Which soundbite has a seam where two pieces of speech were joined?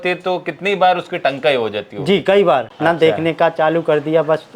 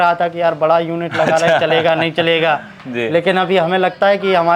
first; 1 cut; at 2.7 s

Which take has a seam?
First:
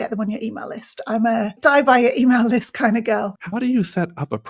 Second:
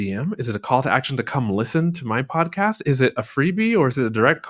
first; 2 cuts; at 1.5 s, 3.4 s

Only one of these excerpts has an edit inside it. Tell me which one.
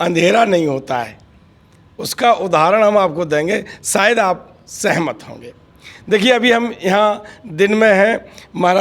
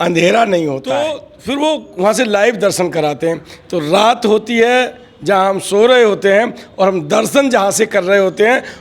second; 1 cut; at 0.9 s

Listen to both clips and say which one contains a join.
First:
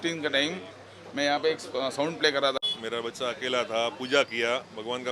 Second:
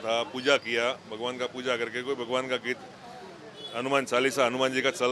first; 1 cut; at 2.6 s

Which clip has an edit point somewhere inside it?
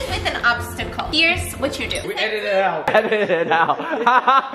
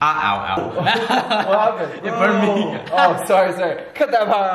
first; 3 cuts; at 1.1 s, 2.0 s, 2.9 s

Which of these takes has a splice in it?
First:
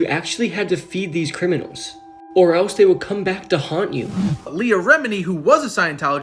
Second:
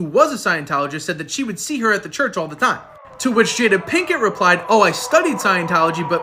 first; 1 cut; at 4.4 s

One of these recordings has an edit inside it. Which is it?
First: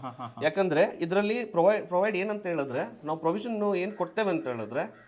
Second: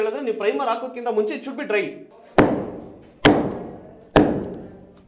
second; 1 cut; at 2.0 s

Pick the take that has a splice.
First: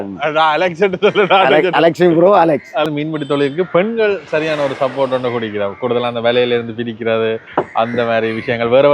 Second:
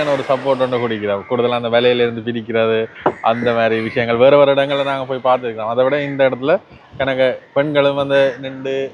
first; 1 cut; at 2.9 s

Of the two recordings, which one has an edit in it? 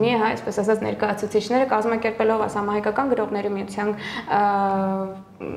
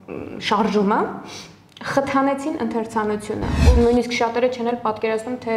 second; 1 cut; at 3.6 s

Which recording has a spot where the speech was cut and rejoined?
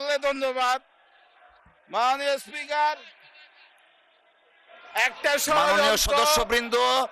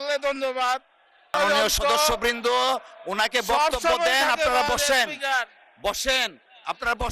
second; 1 cut; at 1.3 s

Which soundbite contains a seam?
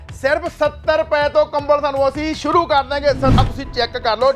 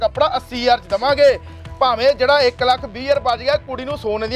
first; 1 cut; at 3.4 s

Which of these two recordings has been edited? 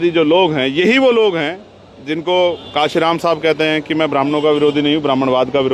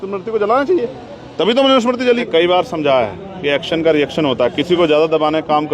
second; 1 cut; at 2.3 s

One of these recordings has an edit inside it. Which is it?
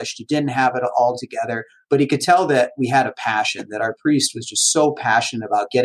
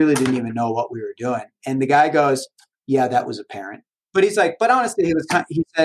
second; 1 cut; at 4.0 s

